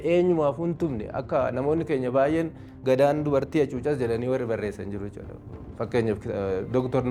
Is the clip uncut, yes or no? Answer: yes